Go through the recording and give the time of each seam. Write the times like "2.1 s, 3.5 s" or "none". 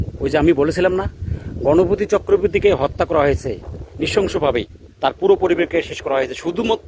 none